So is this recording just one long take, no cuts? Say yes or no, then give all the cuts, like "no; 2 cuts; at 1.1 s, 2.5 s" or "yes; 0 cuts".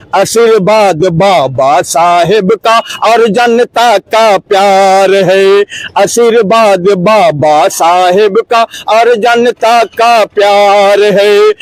yes; 0 cuts